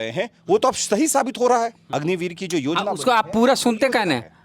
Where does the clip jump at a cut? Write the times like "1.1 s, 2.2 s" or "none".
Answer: 1.8 s